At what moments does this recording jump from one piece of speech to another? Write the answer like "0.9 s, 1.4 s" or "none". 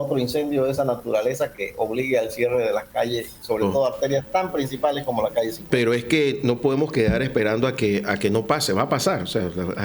none